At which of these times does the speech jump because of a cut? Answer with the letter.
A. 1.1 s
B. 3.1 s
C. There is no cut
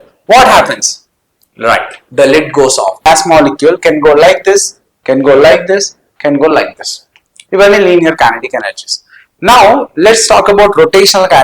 B